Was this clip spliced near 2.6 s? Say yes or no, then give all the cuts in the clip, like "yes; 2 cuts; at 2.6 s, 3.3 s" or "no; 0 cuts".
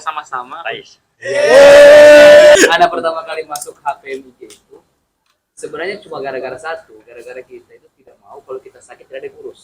yes; 1 cut; at 2.6 s